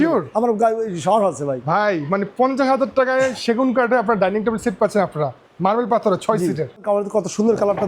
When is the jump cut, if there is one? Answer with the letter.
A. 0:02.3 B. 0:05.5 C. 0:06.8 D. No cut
C